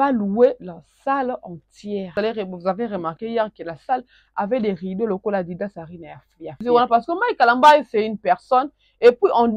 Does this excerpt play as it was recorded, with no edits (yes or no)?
no